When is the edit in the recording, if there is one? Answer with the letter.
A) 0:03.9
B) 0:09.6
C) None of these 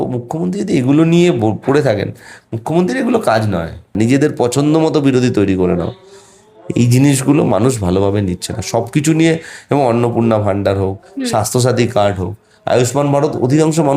A